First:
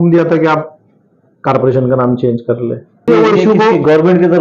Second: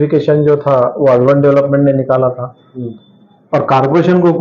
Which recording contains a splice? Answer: first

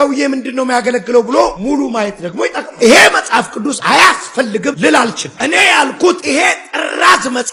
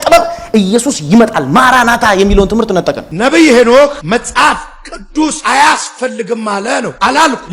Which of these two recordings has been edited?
second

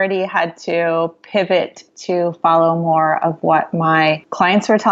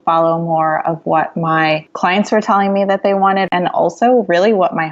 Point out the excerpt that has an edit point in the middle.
second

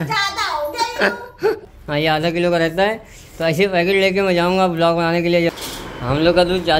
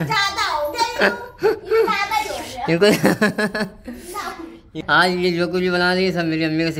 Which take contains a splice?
first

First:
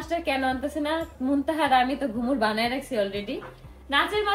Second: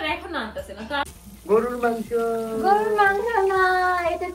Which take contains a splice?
second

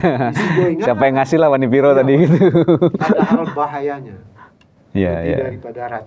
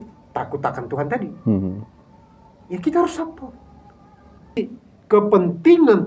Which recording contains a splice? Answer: second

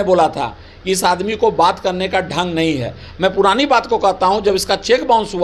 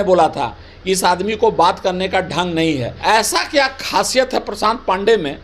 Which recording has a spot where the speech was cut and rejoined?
second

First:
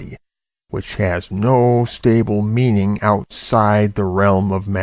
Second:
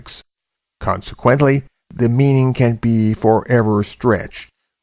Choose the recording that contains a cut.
second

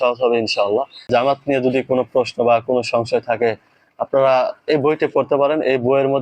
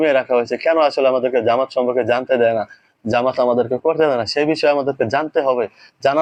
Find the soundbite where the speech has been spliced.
first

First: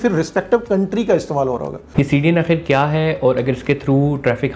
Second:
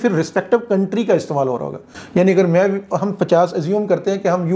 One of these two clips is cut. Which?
first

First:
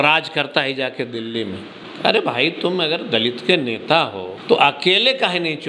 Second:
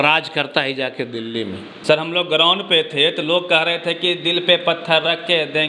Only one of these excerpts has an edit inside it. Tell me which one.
first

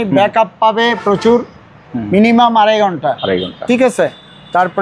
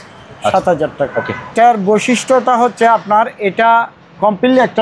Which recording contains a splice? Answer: second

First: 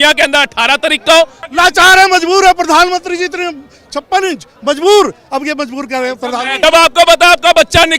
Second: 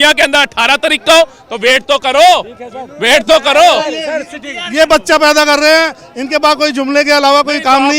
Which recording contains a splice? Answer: first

